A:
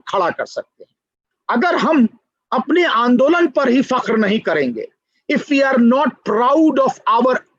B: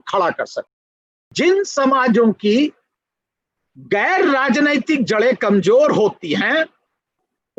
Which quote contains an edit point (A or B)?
B